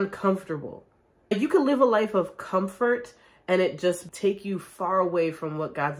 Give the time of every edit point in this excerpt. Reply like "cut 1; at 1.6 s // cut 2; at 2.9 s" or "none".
cut 1; at 1.3 s // cut 2; at 4.0 s